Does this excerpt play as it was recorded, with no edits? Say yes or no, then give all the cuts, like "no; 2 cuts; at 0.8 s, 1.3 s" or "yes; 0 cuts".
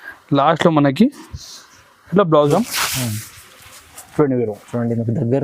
no; 1 cut; at 2.5 s